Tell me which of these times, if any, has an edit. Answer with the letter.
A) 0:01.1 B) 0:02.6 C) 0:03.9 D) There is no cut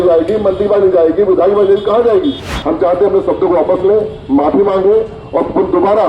B